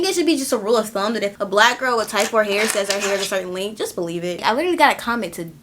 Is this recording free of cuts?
no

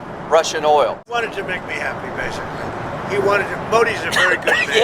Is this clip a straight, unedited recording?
no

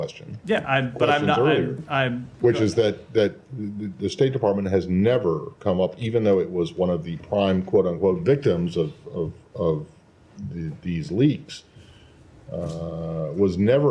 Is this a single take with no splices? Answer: yes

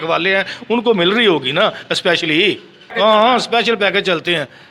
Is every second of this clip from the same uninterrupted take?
no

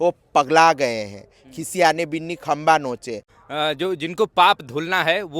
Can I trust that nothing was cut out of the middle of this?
no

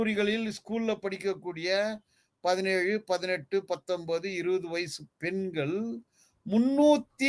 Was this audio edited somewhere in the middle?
no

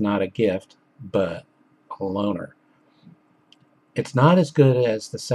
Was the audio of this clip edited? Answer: no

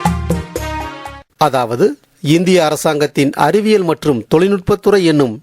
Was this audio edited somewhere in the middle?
yes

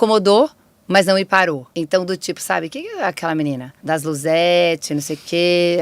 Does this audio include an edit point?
yes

